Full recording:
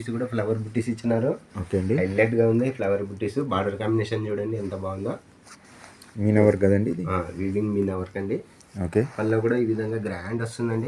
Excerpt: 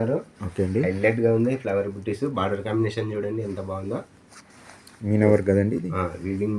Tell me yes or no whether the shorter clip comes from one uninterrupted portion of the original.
yes